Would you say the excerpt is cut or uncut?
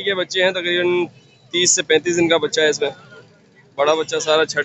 uncut